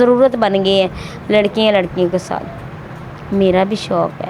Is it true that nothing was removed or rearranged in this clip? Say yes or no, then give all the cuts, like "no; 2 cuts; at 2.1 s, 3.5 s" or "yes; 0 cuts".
yes; 0 cuts